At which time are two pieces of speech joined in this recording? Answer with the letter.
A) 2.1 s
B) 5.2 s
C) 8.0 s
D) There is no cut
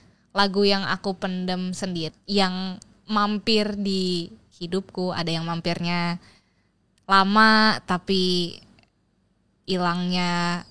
A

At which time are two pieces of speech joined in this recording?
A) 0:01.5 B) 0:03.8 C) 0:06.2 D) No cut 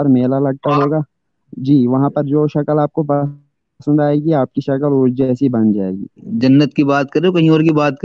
C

